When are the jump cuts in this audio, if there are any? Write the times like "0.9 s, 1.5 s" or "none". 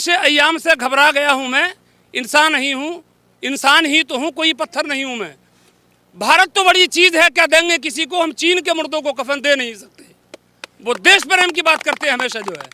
5.7 s